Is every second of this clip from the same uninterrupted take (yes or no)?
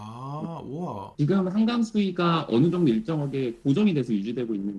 no